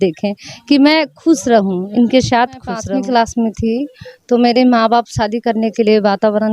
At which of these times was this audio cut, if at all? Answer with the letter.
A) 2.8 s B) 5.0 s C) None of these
A